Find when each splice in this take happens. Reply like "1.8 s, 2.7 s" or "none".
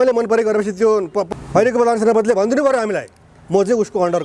1.3 s

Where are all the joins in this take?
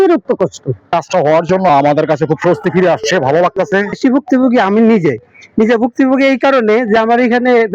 0.9 s, 4.0 s

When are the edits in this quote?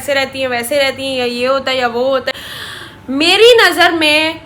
none

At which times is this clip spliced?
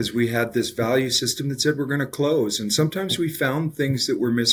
none

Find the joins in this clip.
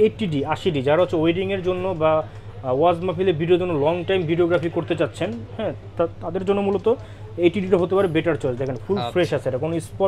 none

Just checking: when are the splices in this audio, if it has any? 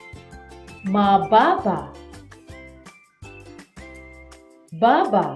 1.9 s, 4.4 s

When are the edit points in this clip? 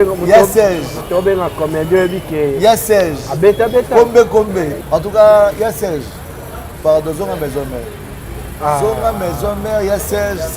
none

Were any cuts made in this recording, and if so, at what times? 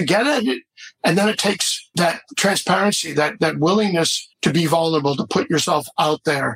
1.9 s, 4.2 s

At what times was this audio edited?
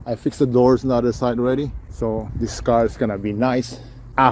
none

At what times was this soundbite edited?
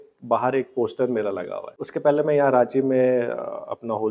1.6 s

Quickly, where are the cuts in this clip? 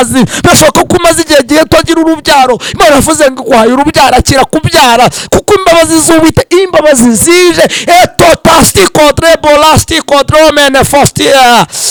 none

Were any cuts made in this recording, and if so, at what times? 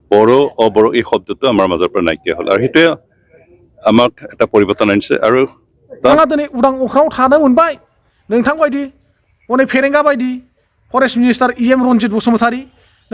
6.0 s

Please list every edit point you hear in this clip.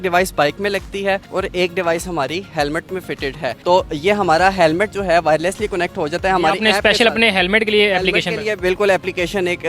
none

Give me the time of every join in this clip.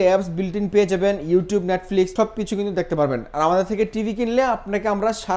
none

